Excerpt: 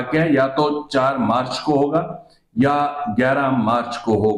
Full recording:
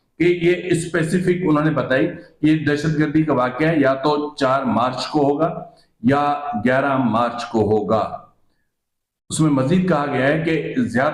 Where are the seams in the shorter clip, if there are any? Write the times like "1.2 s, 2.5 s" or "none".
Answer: none